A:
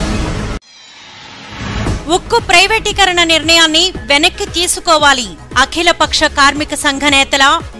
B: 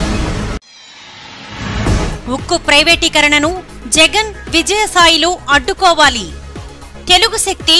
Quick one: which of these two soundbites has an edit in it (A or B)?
B